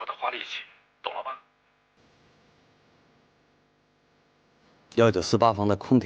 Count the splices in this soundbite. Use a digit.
1